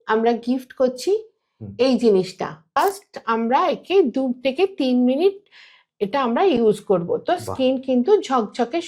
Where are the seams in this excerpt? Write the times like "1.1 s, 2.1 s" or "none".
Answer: 2.8 s